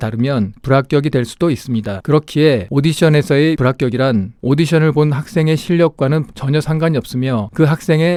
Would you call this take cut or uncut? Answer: uncut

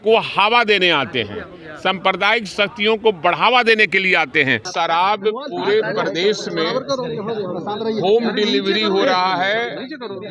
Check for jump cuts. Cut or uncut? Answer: cut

